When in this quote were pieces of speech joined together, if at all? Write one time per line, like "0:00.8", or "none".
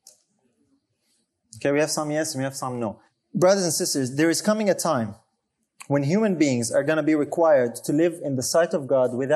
0:03.1